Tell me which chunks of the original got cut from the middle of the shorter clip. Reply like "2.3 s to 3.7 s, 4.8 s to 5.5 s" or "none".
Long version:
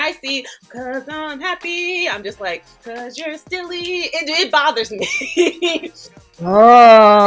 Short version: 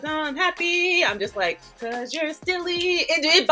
none

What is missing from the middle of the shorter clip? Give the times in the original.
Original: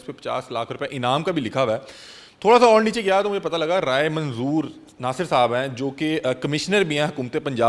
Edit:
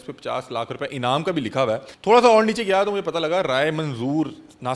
1.9 s to 2.3 s

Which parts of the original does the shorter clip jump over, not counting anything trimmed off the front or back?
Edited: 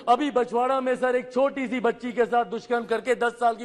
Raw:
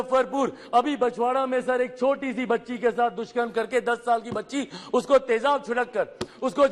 none

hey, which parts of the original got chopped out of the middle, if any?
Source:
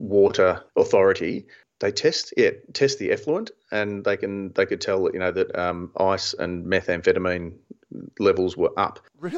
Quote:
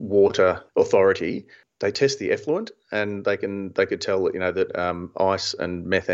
1.9 s to 2.7 s

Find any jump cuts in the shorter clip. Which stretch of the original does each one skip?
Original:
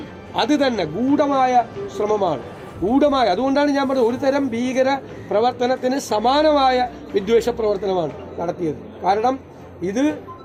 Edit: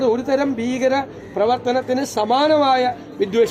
none

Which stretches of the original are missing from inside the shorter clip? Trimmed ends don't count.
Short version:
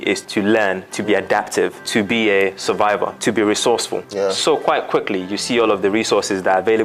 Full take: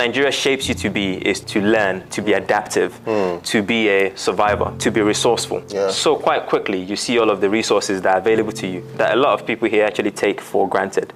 3.0 s to 3.4 s

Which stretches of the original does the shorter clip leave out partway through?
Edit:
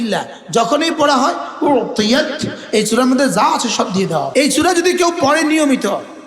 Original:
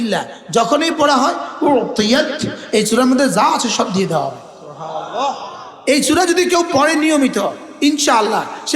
4.3 s to 5.8 s

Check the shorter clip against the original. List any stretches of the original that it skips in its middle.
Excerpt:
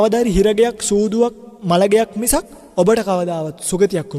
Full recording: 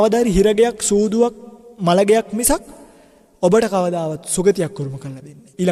1.5 s to 1.6 s, 2.7 s to 3.2 s

